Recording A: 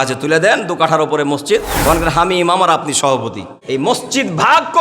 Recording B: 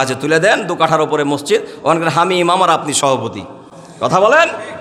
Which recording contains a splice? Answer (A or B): A